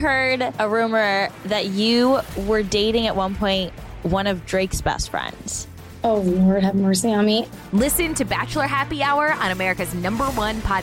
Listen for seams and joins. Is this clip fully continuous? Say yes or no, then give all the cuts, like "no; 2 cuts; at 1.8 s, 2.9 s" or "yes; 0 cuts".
yes; 0 cuts